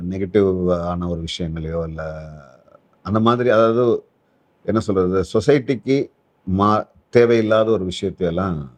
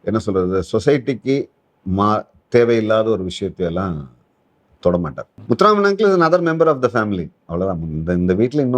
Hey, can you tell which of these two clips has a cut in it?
second; 1 cut; at 5.3 s

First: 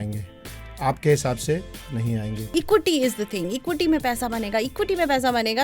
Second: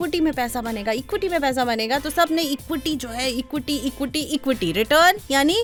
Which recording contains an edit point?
first; 1 cut; at 2.4 s

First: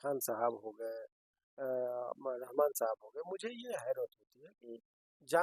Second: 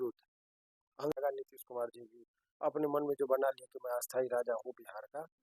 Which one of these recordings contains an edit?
second; 1 cut; at 1.2 s

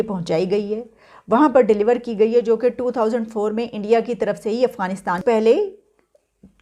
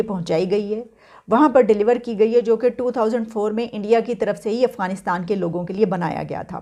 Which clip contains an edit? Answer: first; 1 cut; at 5.2 s

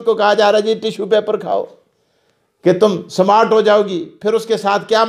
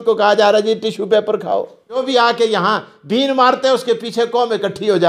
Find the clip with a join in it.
second; 1 cut; at 2.0 s

